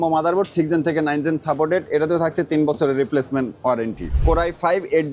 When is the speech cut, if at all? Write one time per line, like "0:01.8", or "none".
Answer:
0:04.1